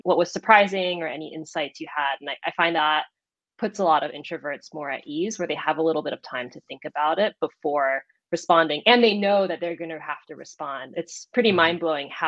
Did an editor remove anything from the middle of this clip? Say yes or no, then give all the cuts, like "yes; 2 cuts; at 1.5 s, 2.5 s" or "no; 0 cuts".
no; 0 cuts